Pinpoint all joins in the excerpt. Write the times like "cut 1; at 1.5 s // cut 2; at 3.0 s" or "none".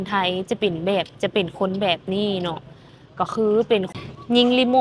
cut 1; at 3.9 s